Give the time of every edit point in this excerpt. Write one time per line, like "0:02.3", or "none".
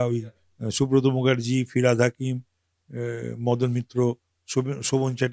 none